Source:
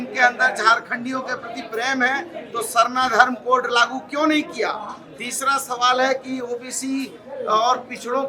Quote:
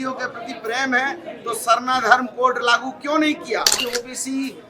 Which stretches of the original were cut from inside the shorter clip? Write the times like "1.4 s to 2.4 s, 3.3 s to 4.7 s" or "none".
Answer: 4.9 s to 6.4 s

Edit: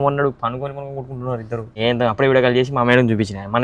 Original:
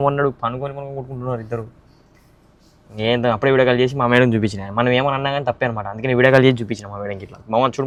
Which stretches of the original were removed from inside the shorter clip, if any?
1.7 s to 2.9 s

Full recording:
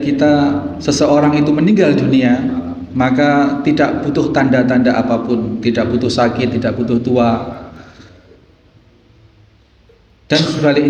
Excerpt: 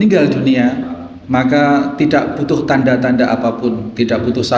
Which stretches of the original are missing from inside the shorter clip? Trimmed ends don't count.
none

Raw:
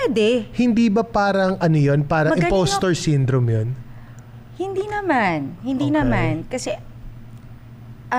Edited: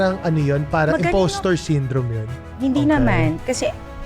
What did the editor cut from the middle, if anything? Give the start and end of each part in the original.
3.9 s to 5.5 s

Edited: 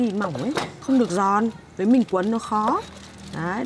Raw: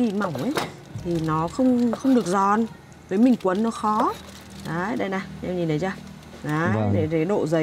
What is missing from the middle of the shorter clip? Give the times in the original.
0.8 s to 2.0 s, 2.8 s to 3.0 s

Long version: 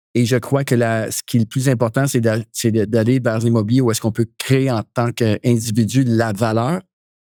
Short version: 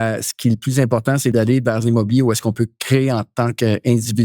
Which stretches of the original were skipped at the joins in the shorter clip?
2.2 s to 2.9 s

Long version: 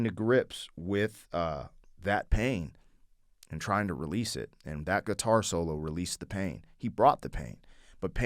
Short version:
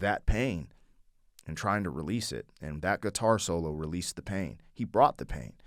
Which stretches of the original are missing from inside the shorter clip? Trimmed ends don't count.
none

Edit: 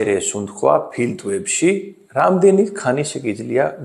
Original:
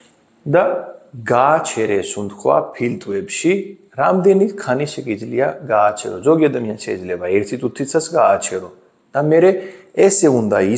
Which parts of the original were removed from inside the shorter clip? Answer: none

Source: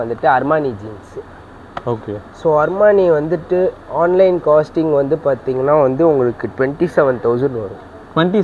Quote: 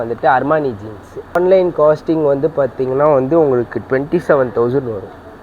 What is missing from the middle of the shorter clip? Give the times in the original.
1.3 s to 4.0 s

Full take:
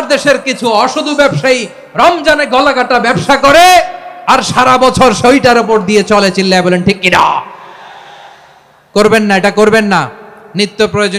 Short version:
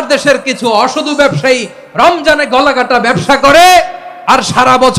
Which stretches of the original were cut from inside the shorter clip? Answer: none

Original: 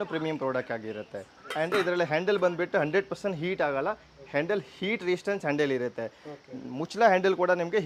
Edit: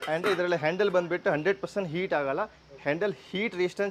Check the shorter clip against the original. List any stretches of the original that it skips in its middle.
none

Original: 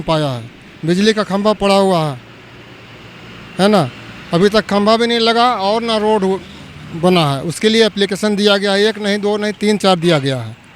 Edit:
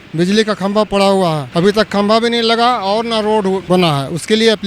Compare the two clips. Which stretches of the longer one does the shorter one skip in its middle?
2.1 s to 4.2 s, 6.4 s to 7.0 s

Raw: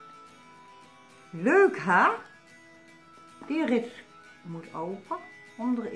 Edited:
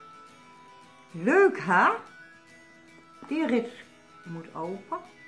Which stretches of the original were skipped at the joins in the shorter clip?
1.1 s to 1.3 s

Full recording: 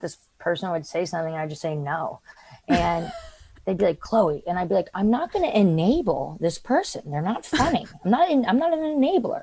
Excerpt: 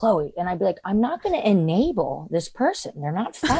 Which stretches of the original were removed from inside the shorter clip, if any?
none

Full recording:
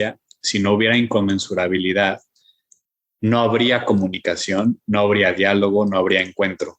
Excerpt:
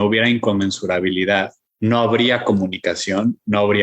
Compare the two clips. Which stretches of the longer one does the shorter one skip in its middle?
2.3 s to 3.0 s

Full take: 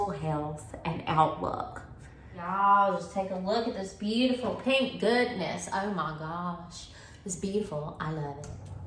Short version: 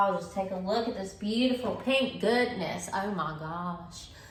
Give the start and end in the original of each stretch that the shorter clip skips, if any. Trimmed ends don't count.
none

